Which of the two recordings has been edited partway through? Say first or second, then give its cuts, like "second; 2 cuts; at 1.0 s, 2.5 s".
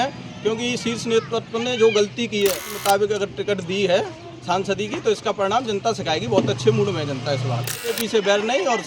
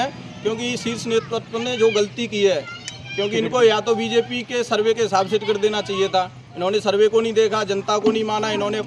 first; 2 cuts; at 2.7 s, 7.9 s